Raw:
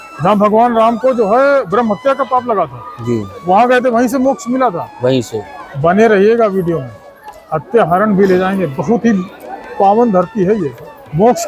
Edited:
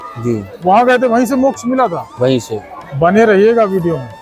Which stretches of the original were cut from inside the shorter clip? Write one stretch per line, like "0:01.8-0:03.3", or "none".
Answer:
none